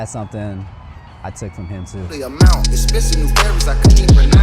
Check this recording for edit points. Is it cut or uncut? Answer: cut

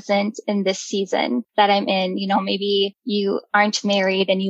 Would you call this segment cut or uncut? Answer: cut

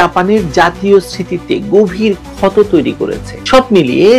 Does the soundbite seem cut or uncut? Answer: cut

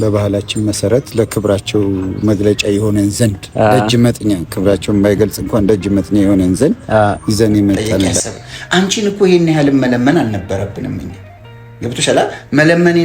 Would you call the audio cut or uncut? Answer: cut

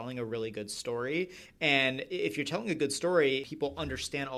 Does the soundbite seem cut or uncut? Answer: cut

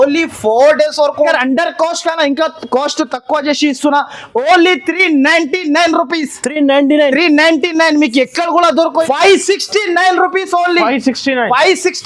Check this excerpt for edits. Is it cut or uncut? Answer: cut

